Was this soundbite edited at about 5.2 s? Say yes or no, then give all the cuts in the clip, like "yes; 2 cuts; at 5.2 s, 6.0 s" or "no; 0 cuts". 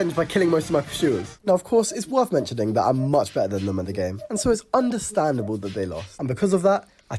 yes; 2 cuts; at 2.3 s, 5.2 s